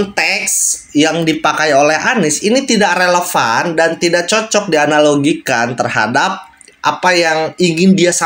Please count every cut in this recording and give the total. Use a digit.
0